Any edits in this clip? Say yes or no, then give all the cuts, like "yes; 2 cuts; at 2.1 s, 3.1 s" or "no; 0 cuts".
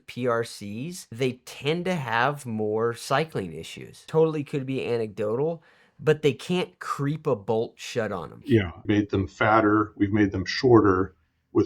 yes; 3 cuts; at 1.1 s, 4.0 s, 8.8 s